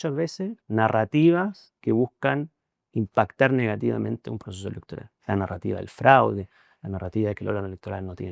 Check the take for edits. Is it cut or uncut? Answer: uncut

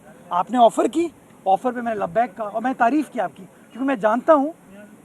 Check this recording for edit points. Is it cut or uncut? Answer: uncut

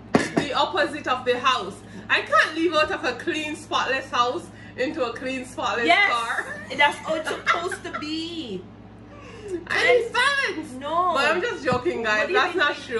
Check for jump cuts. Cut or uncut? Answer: uncut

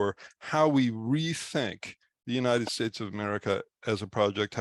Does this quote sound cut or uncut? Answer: uncut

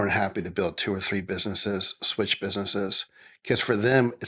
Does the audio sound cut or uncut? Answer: uncut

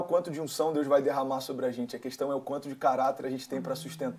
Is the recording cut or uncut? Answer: uncut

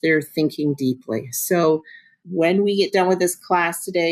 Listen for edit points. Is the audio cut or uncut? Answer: cut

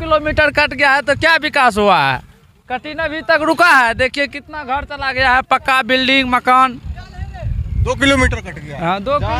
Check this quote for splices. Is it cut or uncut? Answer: uncut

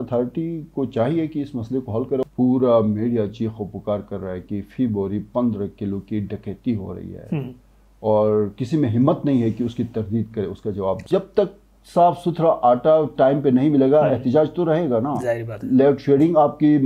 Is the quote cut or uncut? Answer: cut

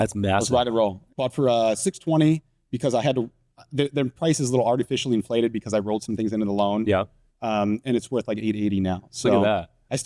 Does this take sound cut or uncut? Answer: cut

